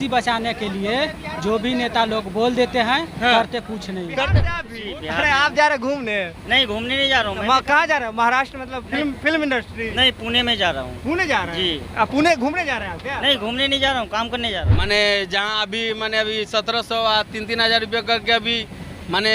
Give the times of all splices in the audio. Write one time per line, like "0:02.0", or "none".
0:04.6
0:14.7